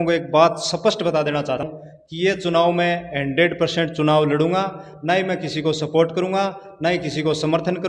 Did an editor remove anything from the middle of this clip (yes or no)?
yes